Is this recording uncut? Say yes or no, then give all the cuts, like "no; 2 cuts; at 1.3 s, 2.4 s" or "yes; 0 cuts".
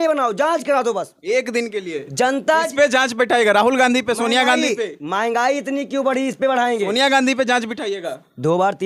yes; 0 cuts